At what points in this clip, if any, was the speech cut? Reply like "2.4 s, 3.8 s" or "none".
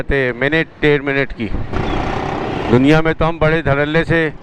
1.7 s